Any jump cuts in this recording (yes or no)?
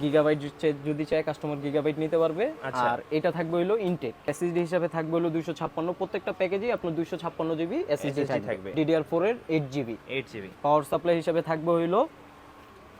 yes